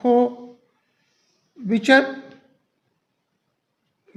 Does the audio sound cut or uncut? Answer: uncut